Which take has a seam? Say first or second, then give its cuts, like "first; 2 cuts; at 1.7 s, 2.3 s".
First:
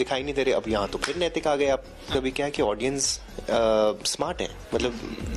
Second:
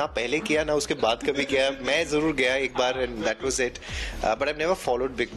first; 1 cut; at 2.1 s